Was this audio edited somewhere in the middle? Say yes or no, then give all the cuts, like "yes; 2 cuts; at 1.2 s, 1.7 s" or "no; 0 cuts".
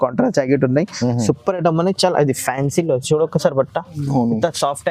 no; 0 cuts